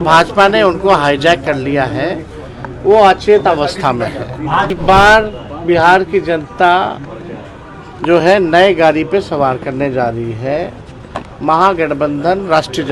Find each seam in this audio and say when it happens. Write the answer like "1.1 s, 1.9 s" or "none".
4.7 s